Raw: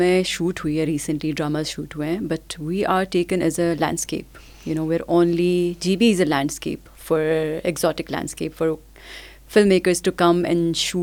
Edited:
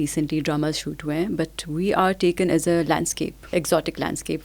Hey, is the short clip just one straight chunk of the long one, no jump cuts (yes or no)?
no